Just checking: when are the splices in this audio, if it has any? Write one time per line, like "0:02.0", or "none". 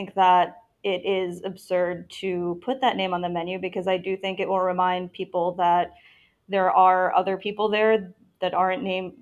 none